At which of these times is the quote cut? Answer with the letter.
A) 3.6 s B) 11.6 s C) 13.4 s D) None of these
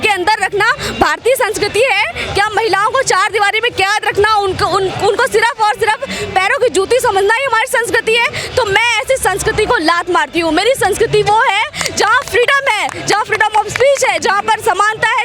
D